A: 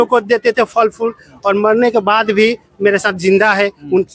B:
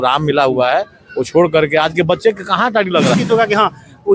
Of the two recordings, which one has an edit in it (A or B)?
B